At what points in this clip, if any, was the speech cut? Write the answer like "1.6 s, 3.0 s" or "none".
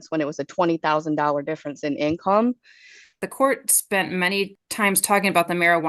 3.3 s, 4.6 s